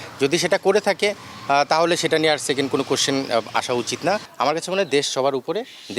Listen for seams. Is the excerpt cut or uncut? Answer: cut